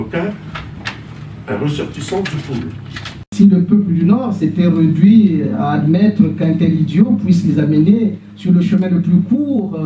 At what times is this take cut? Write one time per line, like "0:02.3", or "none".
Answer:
0:03.2